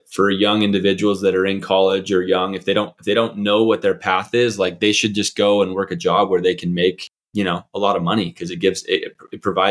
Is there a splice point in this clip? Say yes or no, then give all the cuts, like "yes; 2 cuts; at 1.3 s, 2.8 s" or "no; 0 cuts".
no; 0 cuts